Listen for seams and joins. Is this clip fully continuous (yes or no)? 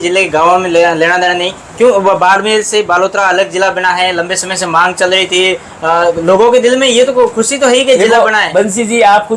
yes